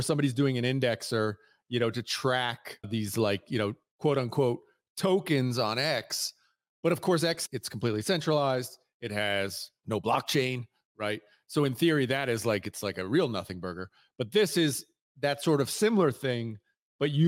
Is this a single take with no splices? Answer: no; 3 cuts; at 2.9 s, 7.4 s, 9.7 s

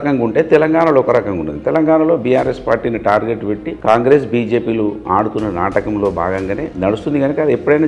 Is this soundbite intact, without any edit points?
yes; 0 cuts

